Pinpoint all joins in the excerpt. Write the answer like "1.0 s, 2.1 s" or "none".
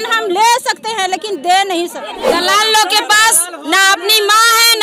2.3 s

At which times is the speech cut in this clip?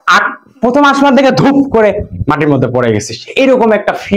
none

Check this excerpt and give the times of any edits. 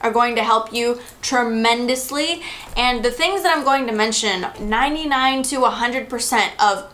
4.5 s

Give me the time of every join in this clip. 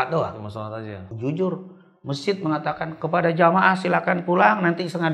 1.0 s

